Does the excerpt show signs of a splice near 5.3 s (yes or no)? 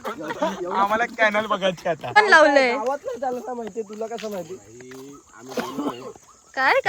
no